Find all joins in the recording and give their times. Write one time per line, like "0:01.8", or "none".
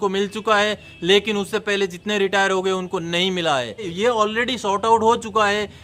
0:03.9

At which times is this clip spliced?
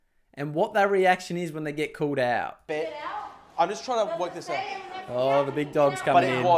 0:02.6

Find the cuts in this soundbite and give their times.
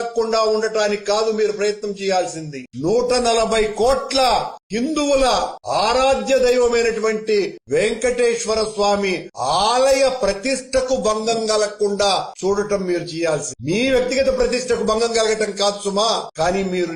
none

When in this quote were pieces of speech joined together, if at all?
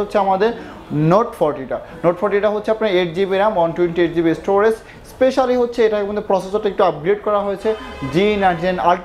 none

